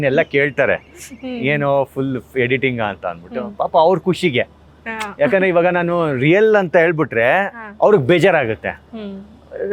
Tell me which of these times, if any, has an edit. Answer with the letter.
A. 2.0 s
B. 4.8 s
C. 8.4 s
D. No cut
D